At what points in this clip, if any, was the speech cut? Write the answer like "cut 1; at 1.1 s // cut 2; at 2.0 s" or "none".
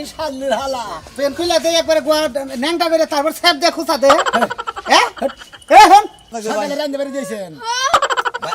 cut 1; at 6.4 s